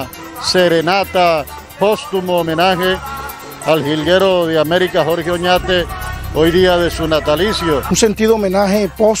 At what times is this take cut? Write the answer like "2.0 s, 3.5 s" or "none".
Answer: 7.9 s